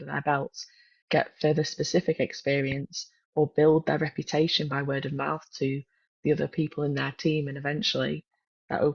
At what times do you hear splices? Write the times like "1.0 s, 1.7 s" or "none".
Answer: none